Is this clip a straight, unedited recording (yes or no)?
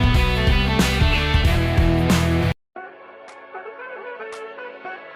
no